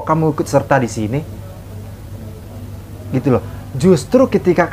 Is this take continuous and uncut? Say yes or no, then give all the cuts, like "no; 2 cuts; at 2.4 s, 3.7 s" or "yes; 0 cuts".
yes; 0 cuts